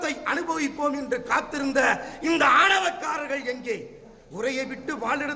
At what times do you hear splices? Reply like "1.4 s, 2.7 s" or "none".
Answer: none